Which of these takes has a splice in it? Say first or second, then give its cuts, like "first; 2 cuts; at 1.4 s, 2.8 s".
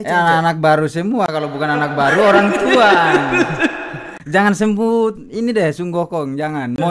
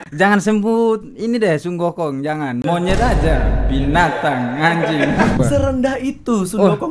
second; 1 cut; at 5.4 s